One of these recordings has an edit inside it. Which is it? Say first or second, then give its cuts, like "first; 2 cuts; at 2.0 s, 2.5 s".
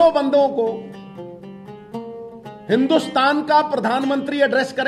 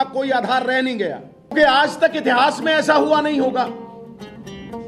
second; 2 cuts; at 1.5 s, 3.7 s